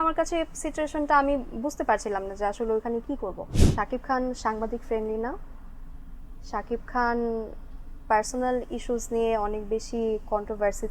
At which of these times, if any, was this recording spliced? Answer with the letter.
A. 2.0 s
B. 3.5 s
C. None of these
B